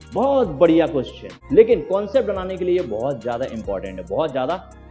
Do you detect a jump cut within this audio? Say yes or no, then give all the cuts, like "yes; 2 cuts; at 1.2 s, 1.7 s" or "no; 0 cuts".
yes; 1 cut; at 1.3 s